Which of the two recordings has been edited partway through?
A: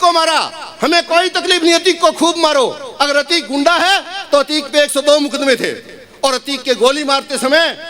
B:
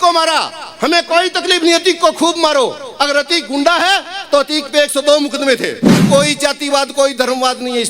B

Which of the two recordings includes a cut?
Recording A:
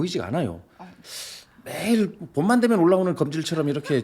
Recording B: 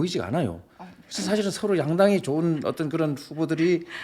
A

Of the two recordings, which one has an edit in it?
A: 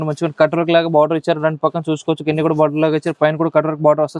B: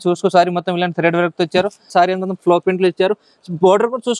B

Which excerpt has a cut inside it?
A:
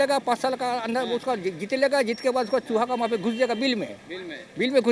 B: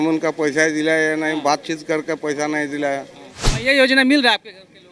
B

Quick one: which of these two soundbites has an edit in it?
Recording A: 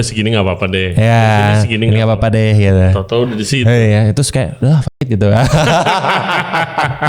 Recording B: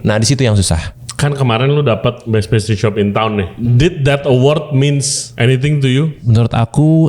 B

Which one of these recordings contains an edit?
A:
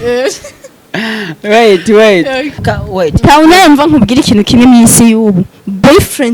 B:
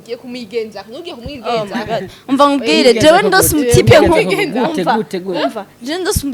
A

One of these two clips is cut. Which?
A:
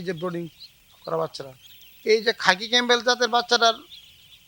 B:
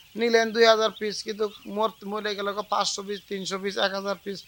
A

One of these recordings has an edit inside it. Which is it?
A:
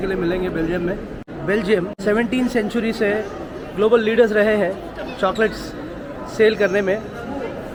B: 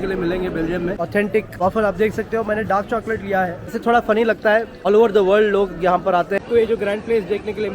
B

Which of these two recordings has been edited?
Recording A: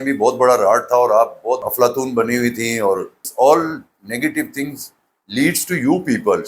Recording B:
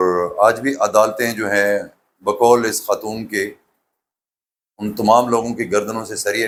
A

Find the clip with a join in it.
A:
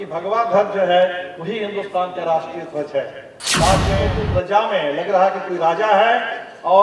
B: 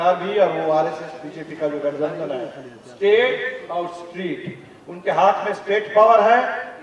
A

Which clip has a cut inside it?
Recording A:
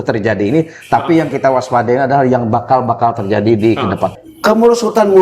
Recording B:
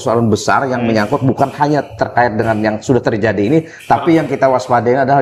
A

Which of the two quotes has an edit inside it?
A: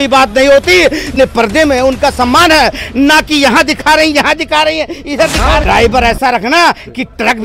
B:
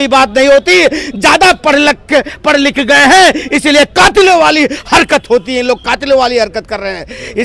A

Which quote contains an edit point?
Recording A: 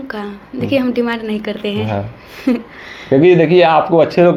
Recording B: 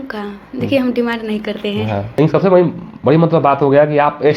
B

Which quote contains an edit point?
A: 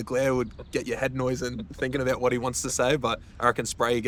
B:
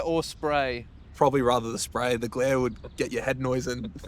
B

